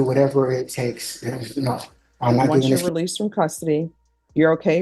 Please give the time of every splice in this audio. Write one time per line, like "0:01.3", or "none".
0:02.8

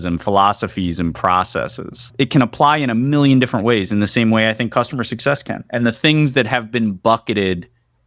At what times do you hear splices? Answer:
0:02.1

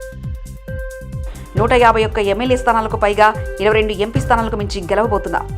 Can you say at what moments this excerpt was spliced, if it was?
0:01.1

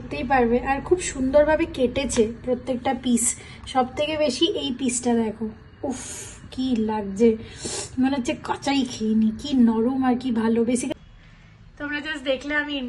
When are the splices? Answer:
0:11.0

